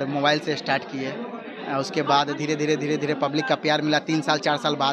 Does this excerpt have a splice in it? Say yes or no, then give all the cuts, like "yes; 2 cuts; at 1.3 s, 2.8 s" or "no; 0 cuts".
no; 0 cuts